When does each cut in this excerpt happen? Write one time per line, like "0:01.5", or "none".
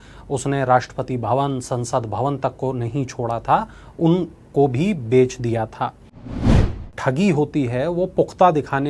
0:06.7